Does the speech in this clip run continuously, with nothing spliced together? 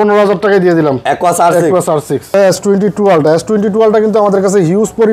no; 1 cut; at 2.3 s

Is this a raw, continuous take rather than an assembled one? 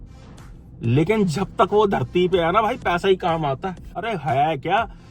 no; 1 cut; at 3.8 s

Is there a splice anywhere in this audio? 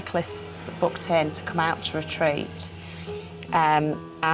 no; 0 cuts

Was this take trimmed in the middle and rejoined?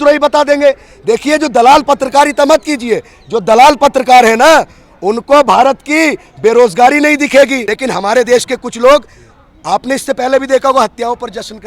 yes; 1 cut; at 7.7 s

